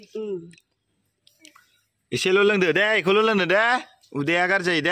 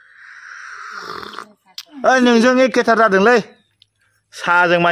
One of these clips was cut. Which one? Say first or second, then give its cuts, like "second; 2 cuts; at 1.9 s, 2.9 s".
second; 1 cut; at 1.8 s